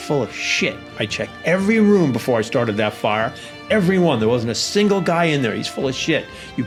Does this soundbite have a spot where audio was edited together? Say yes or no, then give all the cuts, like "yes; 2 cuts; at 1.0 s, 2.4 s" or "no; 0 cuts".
no; 0 cuts